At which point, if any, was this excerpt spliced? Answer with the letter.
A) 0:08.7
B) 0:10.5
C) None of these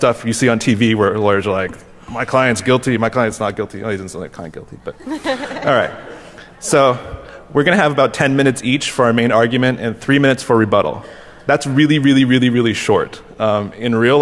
A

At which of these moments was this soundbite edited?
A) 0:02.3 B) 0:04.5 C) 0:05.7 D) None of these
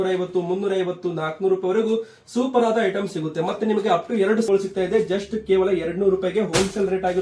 B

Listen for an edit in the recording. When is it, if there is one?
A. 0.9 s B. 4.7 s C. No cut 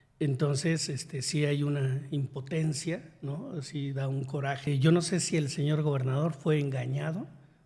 B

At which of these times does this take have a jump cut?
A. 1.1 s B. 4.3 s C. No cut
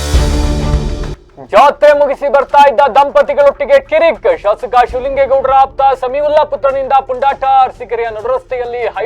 A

